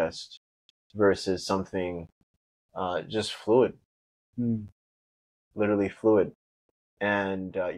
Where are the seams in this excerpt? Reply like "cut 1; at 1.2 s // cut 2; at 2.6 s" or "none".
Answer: none